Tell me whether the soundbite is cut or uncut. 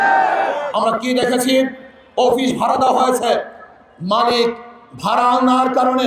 uncut